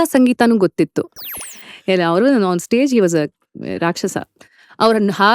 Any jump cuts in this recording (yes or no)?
yes